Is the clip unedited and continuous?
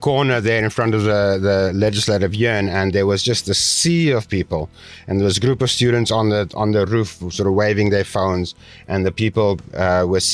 yes; 0 cuts

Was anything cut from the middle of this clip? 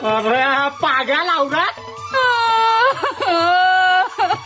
no; 0 cuts

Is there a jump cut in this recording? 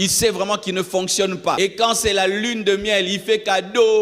yes; 1 cut; at 1.6 s

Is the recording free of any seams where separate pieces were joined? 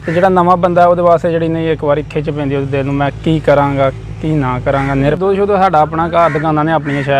no; 1 cut; at 5.2 s

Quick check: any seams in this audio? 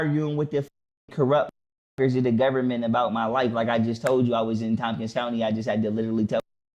no; 0 cuts

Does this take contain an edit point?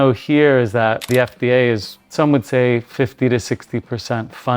yes; 2 cuts; at 1.1 s, 2.0 s

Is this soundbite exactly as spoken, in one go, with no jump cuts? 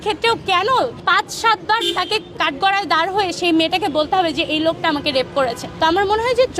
no; 3 cuts; at 1.0 s, 2.4 s, 5.6 s

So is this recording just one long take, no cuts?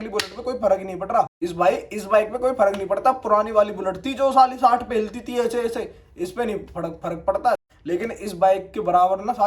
no; 2 cuts; at 1.3 s, 7.6 s

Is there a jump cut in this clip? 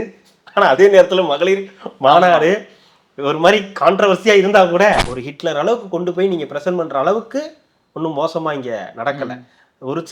yes; 1 cut; at 5.1 s

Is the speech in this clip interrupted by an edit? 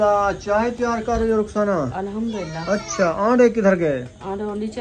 no; 0 cuts

